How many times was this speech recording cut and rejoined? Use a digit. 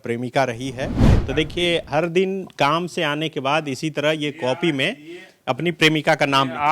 1